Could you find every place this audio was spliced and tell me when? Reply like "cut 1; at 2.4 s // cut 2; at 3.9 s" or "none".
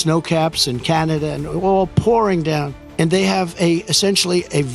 cut 1; at 2.8 s